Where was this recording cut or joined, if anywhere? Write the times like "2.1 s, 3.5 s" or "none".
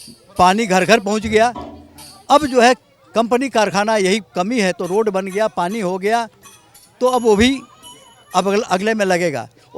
none